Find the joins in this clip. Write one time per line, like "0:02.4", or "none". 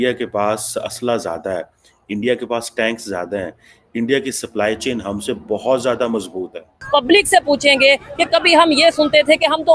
0:06.7